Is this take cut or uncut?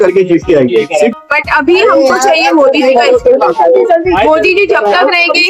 cut